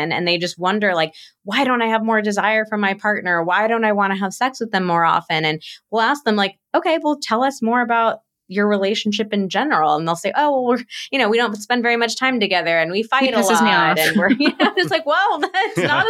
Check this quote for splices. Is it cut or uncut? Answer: uncut